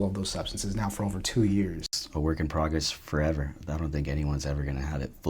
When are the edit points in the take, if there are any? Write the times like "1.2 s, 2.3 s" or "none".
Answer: 1.8 s